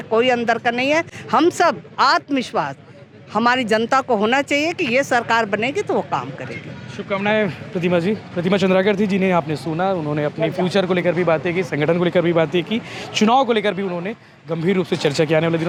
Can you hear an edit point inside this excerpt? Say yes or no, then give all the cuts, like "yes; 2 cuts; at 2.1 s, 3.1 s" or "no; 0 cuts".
no; 0 cuts